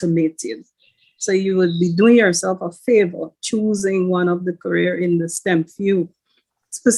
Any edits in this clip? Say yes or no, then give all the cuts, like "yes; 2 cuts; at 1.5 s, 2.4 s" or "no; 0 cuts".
no; 0 cuts